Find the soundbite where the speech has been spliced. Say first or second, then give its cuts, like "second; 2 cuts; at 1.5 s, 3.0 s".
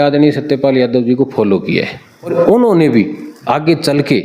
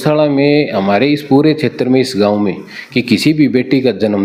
first; 1 cut; at 2.3 s